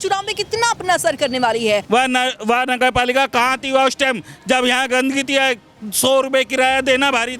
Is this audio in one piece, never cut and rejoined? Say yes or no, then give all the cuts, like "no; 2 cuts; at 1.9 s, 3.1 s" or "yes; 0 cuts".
no; 1 cut; at 1.8 s